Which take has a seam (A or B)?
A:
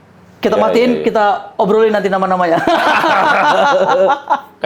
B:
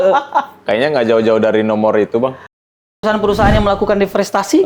B